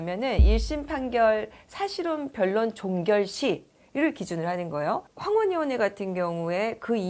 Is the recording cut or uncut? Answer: cut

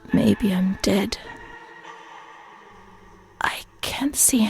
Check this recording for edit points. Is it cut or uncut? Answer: cut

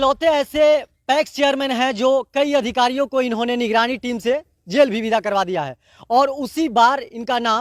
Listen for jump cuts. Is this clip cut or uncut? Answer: uncut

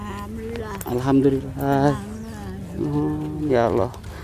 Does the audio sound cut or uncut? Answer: uncut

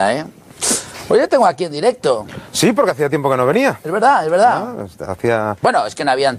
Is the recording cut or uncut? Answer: cut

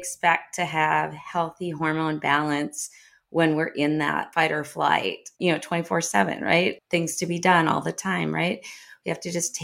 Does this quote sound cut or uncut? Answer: cut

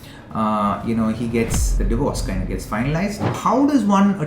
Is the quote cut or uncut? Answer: cut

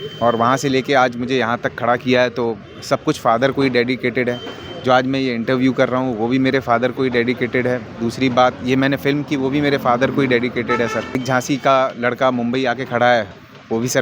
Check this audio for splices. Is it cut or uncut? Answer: cut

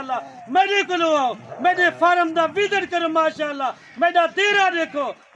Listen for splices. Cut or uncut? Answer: uncut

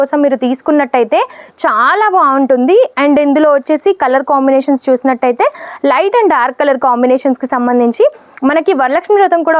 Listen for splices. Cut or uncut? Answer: uncut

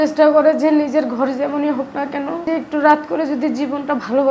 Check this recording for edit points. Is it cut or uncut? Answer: cut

